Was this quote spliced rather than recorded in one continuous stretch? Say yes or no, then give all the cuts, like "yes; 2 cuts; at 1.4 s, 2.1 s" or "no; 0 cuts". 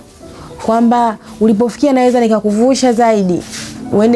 no; 0 cuts